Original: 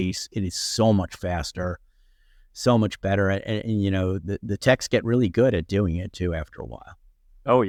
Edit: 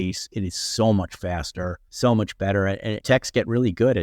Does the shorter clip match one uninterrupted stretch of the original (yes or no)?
no